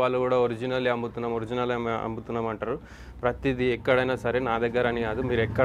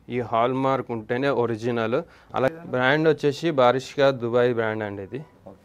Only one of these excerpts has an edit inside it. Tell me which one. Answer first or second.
second